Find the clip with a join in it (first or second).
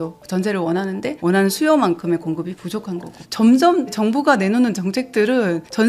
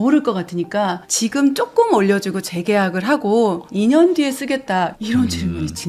first